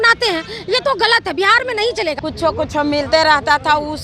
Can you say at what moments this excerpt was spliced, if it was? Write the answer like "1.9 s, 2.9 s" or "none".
2.2 s

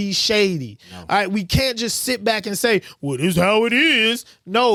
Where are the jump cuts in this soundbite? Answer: none

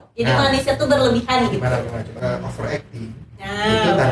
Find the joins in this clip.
2.2 s

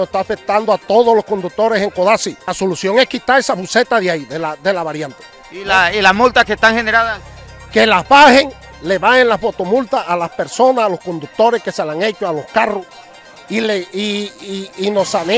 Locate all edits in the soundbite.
2.4 s

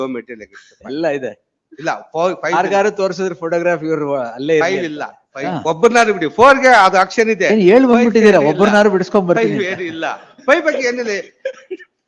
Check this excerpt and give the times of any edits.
5.5 s

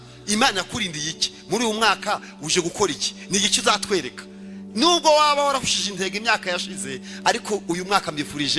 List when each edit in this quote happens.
none

